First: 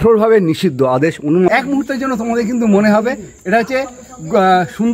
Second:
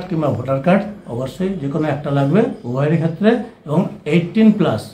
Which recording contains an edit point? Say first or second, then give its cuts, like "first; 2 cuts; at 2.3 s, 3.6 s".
first; 1 cut; at 1.5 s